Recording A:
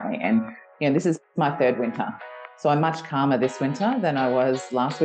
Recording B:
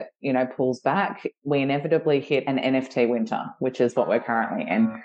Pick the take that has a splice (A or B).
B